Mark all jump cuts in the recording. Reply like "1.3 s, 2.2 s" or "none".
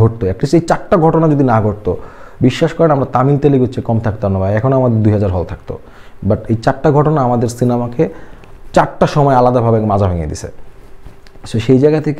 none